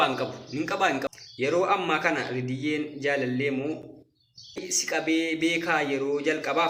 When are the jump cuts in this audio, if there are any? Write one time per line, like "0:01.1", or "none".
0:01.1
0:04.7